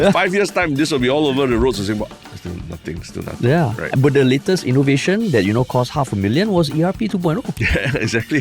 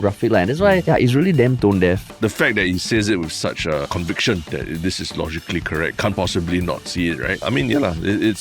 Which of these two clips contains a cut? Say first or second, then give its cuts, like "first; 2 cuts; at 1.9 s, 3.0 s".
second; 5 cuts; at 0.8 s, 2.1 s, 4.3 s, 5.9 s, 7.4 s